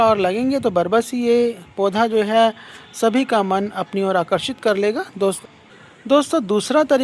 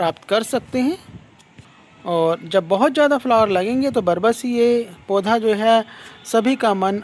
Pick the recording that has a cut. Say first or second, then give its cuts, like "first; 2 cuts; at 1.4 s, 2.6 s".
first; 1 cut; at 5.4 s